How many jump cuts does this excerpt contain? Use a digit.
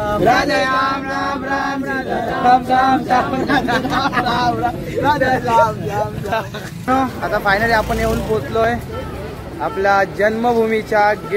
1